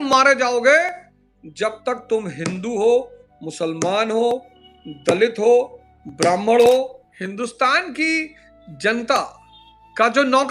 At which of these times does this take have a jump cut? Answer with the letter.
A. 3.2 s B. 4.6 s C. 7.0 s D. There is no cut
C